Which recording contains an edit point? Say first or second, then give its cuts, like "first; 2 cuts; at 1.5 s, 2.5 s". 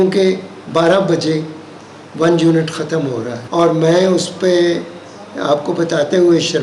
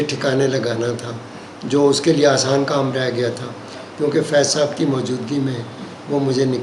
first; 1 cut; at 3.4 s